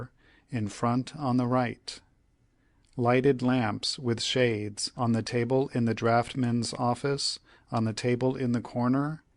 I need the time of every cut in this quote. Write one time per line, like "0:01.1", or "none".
0:01.5

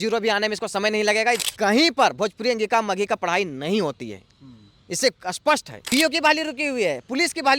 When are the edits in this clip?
0:01.4
0:05.7

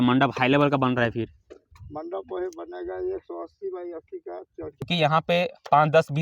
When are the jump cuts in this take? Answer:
0:04.8

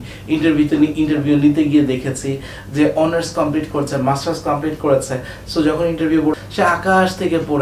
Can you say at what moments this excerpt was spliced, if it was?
0:06.4

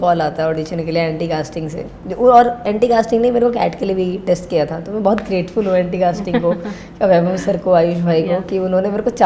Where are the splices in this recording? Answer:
none

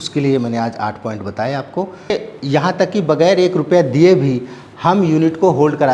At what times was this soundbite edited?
0:02.1

